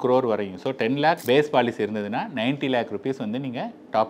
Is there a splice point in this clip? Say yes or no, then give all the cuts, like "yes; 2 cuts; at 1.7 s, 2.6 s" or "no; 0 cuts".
no; 0 cuts